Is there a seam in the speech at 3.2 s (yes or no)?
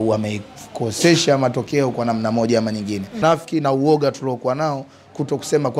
yes